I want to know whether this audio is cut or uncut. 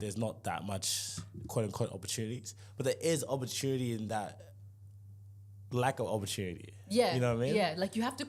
uncut